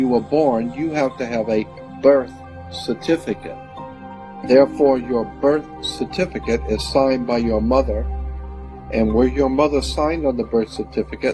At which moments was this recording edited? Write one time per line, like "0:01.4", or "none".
0:04.0